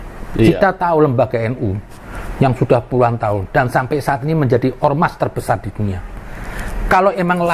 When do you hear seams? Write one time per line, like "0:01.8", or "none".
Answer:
none